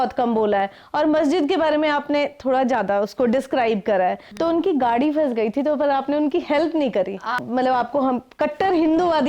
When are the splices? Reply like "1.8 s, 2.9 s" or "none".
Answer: 4.3 s, 7.4 s